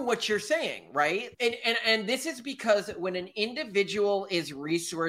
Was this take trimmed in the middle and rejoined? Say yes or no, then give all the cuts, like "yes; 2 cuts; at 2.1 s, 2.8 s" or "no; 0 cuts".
no; 0 cuts